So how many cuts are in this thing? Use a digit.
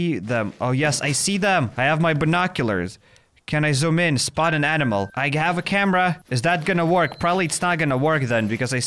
3